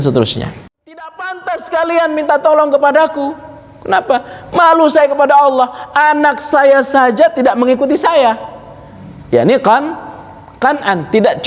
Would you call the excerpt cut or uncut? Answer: cut